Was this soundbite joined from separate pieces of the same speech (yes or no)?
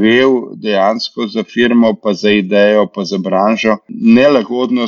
yes